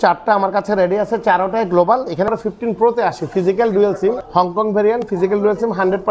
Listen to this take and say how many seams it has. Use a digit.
2